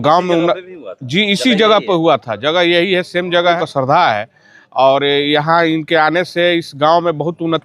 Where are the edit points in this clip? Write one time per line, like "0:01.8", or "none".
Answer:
0:03.6